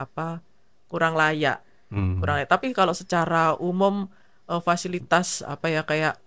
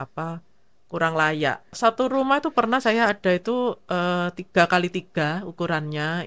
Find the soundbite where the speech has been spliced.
second; 1 cut; at 1.8 s

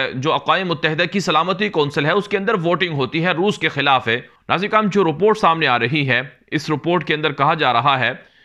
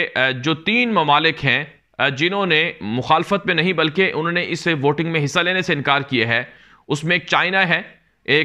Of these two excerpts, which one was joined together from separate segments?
first; 1 cut; at 4.3 s

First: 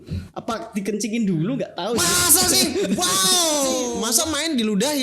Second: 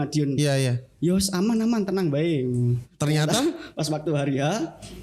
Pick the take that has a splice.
first; 1 cut; at 4.0 s

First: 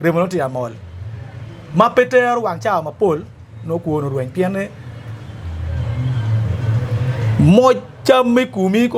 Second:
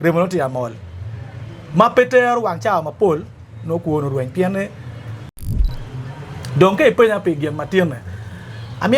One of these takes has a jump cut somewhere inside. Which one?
second; 1 cut; at 5.6 s

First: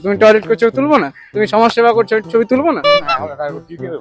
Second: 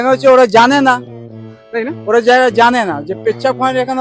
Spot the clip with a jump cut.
first; 1 cut; at 2.9 s

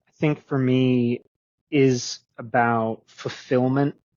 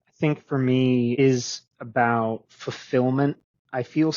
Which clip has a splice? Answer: second; 1 cut; at 1.2 s

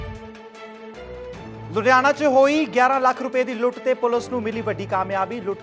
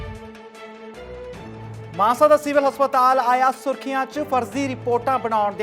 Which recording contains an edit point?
second; 1 cut; at 1.6 s

